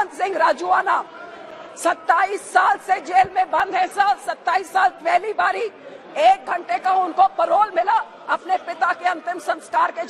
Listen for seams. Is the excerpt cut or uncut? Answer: uncut